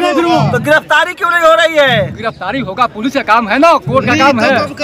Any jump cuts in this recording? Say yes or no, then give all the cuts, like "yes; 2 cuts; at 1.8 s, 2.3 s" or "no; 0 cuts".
no; 0 cuts